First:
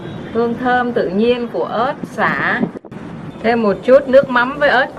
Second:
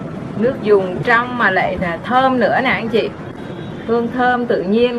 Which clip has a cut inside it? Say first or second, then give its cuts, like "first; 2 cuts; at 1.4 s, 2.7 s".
first; 1 cut; at 2.9 s